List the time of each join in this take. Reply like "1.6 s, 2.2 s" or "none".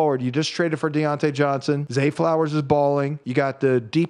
1.9 s, 3.2 s